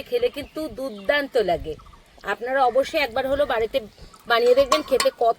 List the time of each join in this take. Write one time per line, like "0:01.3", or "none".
none